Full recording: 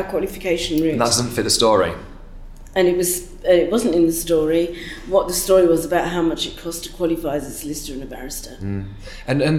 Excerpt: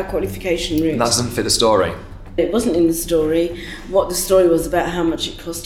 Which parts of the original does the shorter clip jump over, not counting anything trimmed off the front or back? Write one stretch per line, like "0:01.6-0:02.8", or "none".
0:02.4-0:03.6